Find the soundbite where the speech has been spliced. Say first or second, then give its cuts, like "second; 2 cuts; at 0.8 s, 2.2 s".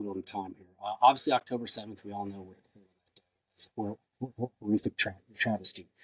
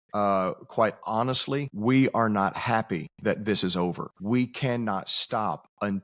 second; 3 cuts; at 1.7 s, 3.1 s, 4.1 s